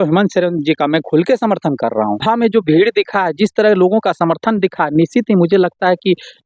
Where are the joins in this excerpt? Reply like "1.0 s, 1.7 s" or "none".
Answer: 2.2 s